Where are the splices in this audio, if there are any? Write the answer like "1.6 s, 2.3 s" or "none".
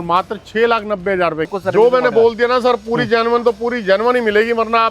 1.6 s